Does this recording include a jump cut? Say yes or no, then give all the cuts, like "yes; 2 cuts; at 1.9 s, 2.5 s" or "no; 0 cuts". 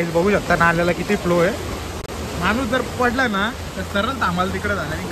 no; 0 cuts